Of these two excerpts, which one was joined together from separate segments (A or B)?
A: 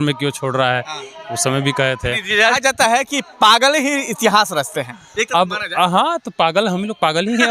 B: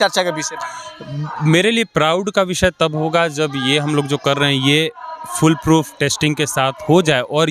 A